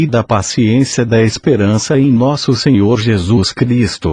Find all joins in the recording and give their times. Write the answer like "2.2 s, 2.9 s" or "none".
1.8 s